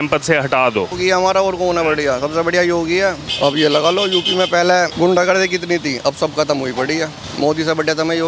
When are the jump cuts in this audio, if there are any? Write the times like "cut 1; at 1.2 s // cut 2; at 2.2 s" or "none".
cut 1; at 0.9 s // cut 2; at 3.3 s // cut 3; at 4.9 s // cut 4; at 7.2 s